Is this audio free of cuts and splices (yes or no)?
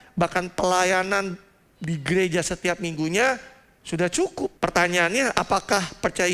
no